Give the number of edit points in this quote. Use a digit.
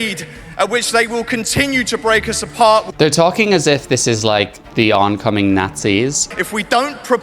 1